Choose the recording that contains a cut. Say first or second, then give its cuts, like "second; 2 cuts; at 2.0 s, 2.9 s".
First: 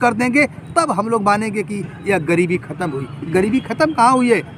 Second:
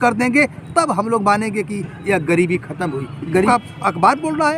second; 1 cut; at 3.5 s